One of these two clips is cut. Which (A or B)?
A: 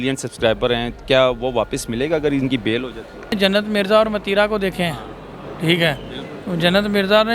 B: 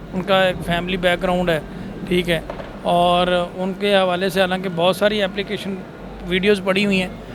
A